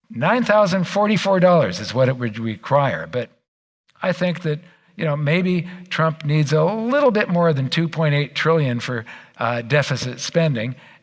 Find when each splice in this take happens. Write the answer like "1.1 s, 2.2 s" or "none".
none

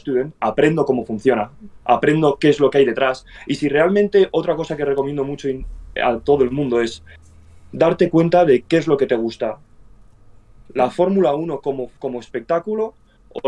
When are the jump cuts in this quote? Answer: none

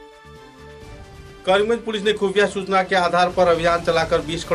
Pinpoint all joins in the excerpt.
1.3 s

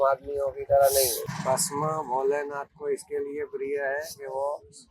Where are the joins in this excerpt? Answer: 1.2 s

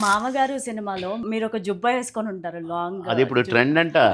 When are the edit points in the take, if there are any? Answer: 1.2 s

